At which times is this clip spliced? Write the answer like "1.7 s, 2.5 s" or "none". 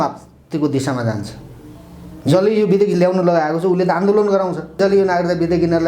4.8 s